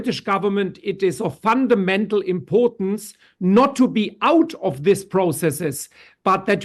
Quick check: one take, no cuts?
yes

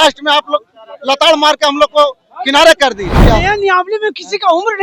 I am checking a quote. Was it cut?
yes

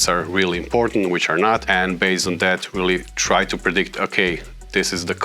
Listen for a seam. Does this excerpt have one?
yes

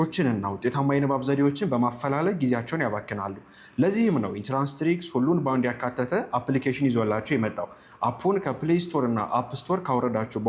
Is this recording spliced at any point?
no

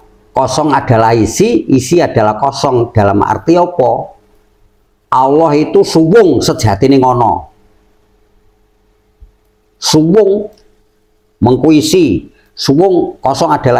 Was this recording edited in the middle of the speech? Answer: no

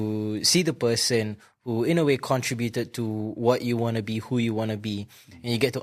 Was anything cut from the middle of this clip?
no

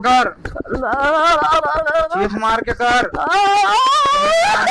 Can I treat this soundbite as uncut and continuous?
yes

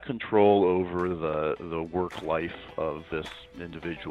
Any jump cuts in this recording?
yes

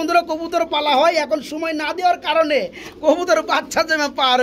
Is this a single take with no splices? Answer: yes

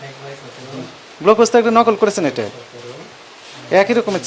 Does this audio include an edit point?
no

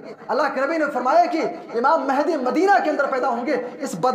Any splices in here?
no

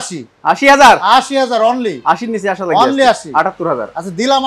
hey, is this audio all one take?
yes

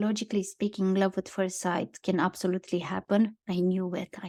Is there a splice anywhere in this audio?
no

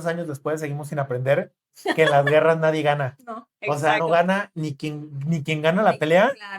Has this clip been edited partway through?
no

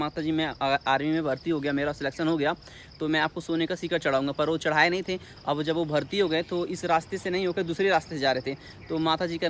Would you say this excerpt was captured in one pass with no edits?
yes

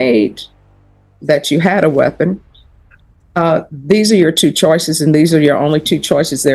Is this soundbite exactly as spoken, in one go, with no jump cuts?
yes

